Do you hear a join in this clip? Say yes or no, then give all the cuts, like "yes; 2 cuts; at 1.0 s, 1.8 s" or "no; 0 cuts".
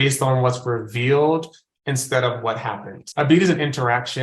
yes; 1 cut; at 3.0 s